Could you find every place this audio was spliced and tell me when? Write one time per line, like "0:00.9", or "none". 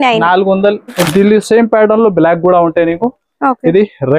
0:01.0